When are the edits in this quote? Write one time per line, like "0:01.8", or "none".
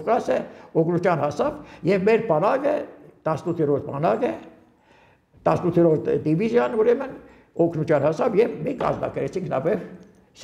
none